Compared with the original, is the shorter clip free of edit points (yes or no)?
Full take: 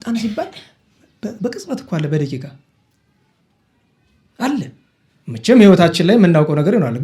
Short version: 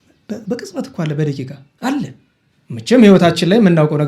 no